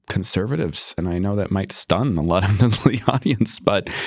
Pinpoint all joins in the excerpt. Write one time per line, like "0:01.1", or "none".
0:00.9